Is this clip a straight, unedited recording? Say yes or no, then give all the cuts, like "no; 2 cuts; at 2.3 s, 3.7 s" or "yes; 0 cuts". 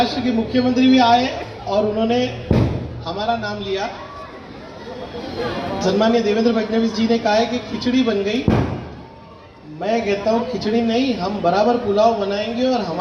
yes; 0 cuts